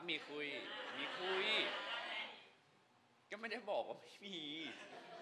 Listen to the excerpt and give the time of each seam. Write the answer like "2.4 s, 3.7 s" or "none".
none

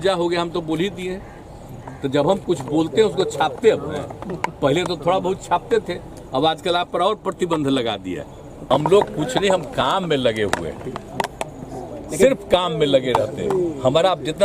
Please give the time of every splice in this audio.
8.7 s

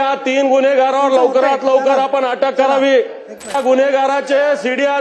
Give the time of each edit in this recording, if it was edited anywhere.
3.5 s

